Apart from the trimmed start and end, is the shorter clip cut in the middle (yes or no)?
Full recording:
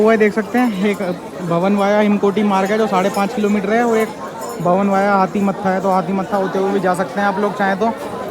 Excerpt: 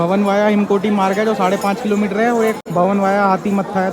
yes